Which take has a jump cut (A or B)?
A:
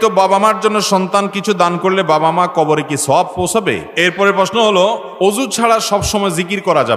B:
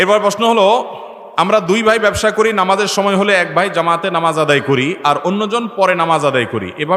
A